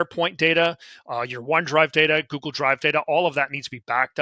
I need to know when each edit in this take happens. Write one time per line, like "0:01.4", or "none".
none